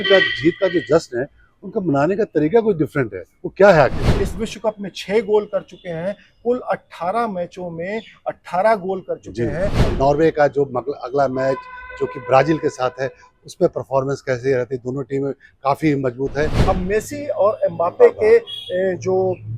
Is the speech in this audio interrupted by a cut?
yes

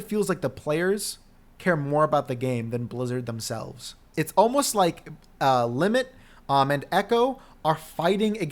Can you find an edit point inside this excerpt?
yes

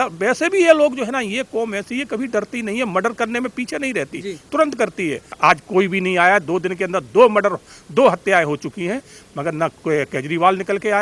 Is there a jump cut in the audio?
yes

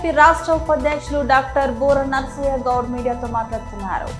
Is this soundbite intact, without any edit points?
yes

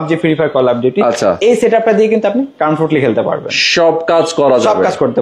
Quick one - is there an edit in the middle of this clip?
no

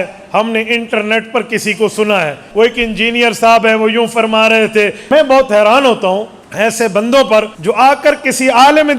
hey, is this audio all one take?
no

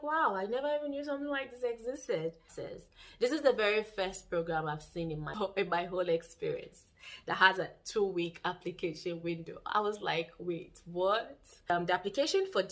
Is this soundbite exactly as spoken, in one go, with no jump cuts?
no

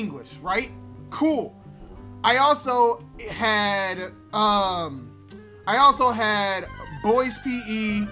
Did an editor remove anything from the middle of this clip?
no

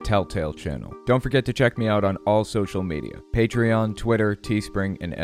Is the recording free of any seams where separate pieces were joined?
yes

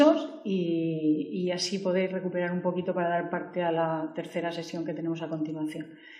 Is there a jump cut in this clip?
yes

